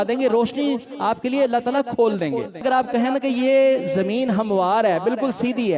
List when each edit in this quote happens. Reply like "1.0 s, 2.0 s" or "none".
2.6 s